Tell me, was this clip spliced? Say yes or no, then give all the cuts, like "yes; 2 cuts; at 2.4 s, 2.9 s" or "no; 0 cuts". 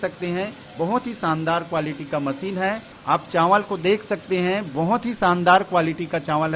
yes; 1 cut; at 2.9 s